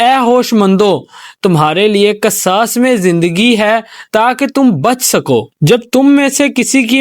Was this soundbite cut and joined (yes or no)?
yes